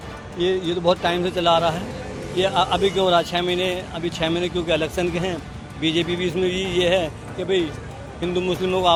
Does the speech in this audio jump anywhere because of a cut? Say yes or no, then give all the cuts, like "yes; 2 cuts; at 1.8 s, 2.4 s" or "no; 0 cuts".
no; 0 cuts